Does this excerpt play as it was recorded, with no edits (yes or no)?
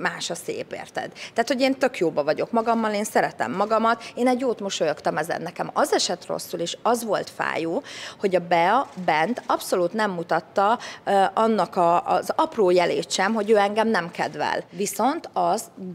no